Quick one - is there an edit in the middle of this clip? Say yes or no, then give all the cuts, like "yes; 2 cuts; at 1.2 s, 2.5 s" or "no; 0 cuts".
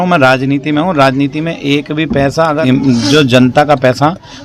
yes; 1 cut; at 2.6 s